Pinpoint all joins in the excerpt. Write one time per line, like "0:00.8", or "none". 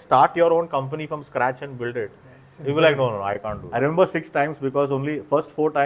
0:03.6